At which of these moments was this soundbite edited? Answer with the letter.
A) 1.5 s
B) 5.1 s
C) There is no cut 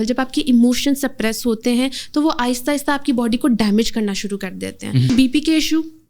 B